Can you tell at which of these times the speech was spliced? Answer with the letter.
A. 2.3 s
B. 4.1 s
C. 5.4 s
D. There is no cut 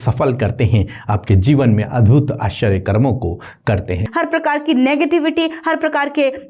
B